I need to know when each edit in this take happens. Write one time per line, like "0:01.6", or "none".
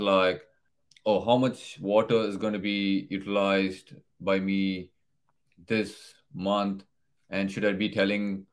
none